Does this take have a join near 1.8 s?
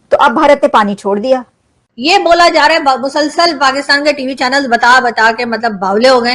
yes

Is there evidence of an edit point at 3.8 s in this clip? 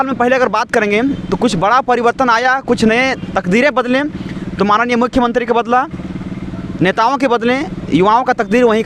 no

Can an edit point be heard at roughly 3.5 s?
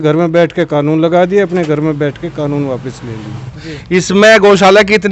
yes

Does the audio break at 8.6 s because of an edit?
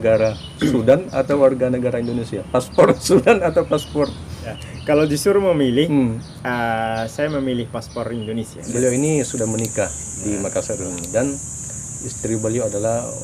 yes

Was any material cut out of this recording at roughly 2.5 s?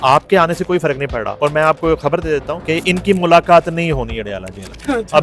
yes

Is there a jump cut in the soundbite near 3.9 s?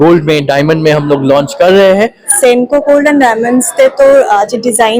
no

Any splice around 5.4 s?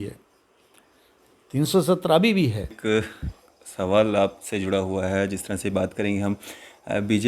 no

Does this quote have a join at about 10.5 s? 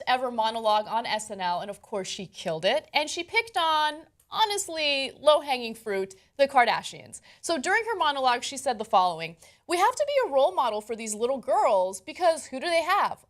yes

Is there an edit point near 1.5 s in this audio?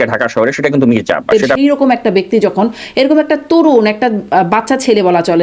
yes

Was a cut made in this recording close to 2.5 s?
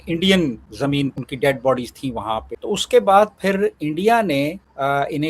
yes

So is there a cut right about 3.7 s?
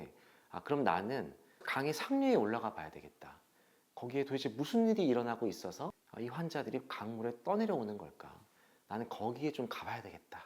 no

